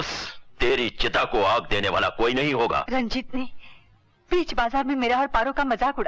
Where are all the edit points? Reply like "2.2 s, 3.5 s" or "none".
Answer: 2.9 s

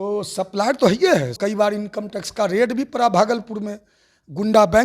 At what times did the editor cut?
1.3 s

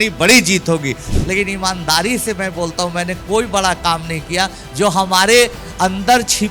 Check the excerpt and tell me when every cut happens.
1.1 s

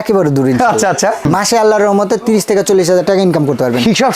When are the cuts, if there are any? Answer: 1.3 s

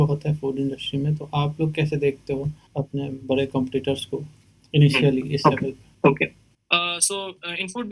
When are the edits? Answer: 2.6 s, 5.8 s

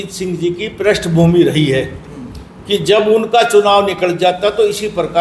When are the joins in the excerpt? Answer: none

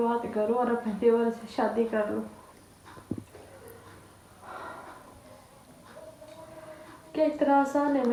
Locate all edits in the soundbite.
none

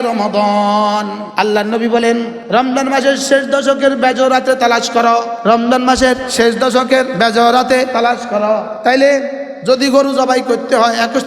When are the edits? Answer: 1.2 s, 2.4 s, 5.3 s, 6.3 s, 7.1 s, 8.2 s

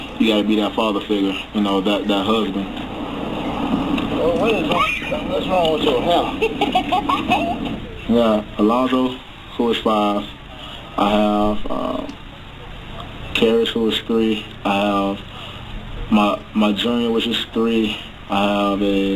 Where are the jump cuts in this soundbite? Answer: 2.2 s

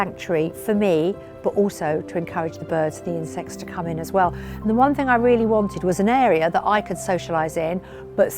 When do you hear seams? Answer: none

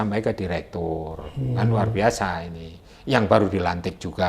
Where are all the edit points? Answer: none

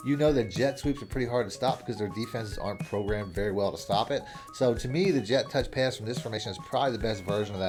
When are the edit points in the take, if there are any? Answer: none

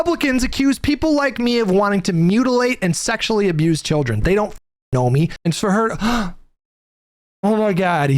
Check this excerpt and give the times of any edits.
5.4 s

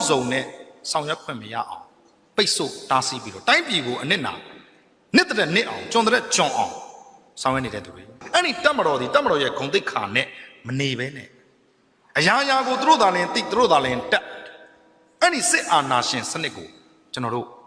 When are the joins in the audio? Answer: 8.1 s

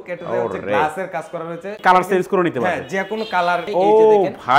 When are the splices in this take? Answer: 1.8 s, 3.7 s

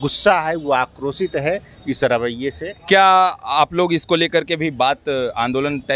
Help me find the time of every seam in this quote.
none

